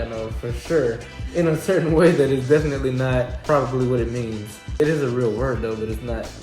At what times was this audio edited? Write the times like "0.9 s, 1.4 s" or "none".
3.4 s, 4.8 s

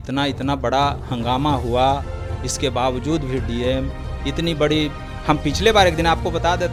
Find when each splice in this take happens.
none

